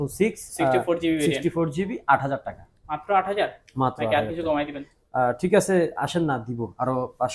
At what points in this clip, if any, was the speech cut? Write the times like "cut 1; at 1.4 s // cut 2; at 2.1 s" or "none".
none